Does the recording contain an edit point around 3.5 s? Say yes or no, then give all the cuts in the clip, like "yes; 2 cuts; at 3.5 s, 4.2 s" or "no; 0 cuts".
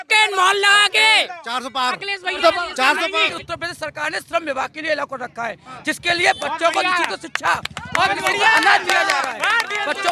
yes; 1 cut; at 3.5 s